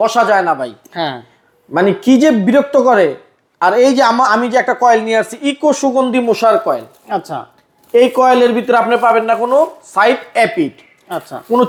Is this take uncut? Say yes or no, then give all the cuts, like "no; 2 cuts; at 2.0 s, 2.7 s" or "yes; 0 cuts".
yes; 0 cuts